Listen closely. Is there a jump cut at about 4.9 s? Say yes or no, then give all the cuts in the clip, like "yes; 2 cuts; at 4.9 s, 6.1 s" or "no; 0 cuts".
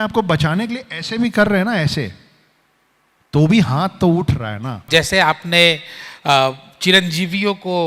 yes; 1 cut; at 4.9 s